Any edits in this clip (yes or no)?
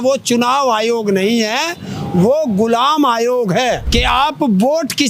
yes